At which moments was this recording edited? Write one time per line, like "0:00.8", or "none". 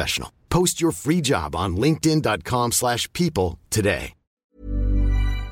0:04.4